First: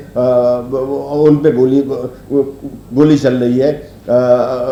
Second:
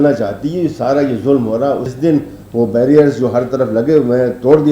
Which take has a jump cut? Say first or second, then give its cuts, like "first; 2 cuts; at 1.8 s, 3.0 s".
second; 1 cut; at 1.9 s